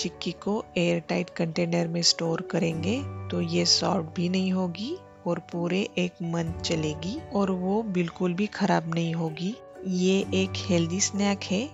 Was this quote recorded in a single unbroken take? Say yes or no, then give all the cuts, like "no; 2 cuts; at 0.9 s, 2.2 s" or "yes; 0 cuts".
yes; 0 cuts